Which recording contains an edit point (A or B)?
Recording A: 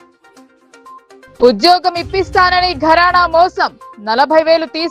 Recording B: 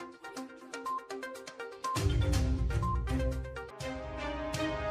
B